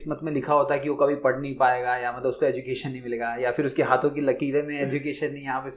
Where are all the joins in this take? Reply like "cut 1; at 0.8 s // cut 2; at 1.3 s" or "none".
none